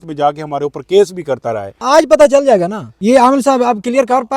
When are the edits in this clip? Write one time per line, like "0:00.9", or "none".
0:01.7
0:02.9